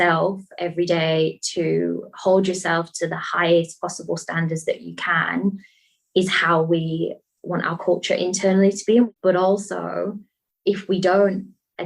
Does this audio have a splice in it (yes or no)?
yes